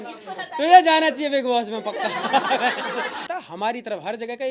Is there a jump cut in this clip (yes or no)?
yes